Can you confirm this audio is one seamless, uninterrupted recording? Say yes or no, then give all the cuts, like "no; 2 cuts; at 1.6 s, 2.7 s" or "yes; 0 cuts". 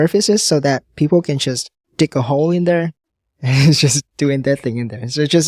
yes; 0 cuts